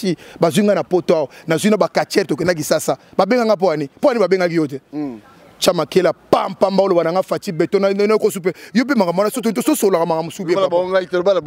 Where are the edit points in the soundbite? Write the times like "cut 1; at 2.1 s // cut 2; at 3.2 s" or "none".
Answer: none